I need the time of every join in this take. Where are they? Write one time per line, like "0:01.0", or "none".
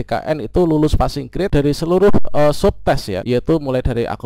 0:01.5
0:03.1